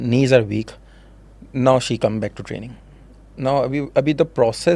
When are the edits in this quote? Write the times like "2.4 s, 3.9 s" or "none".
none

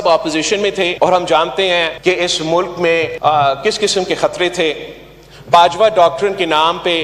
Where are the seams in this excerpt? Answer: 0.9 s, 1.9 s, 3.1 s

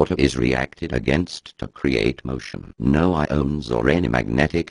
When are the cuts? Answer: none

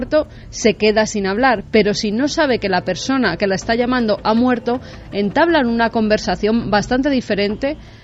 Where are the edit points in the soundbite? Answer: none

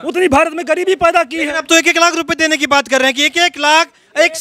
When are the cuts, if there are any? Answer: none

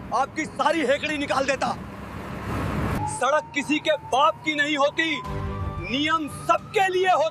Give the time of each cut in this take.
none

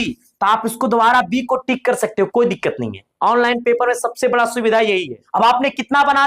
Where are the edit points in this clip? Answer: 5.2 s

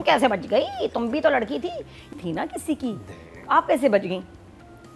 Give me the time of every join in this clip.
2.1 s

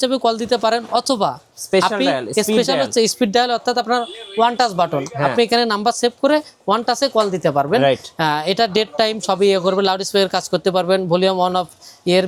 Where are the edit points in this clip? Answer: none

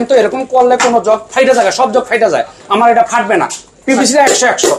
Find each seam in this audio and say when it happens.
1.3 s

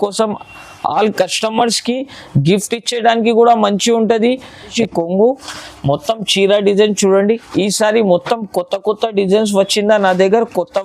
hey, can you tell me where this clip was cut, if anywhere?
4.6 s

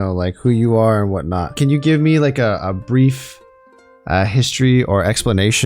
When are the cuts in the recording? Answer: 1.6 s

